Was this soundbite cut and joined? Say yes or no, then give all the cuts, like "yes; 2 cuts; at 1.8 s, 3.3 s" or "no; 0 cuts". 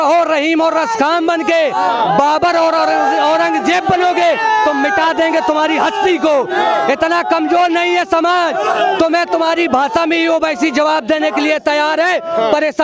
no; 0 cuts